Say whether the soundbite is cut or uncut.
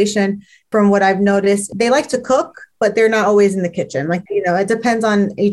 cut